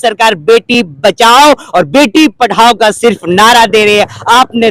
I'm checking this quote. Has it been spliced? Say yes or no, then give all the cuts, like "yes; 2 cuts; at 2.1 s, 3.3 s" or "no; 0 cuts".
no; 0 cuts